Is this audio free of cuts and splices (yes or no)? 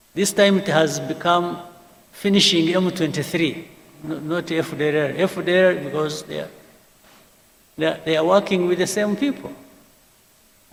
yes